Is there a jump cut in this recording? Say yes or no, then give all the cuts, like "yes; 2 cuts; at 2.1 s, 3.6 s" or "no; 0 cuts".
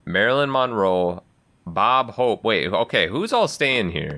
no; 0 cuts